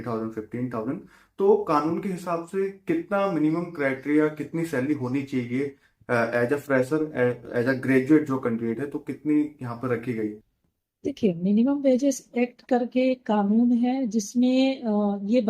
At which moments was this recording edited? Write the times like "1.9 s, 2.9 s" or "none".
none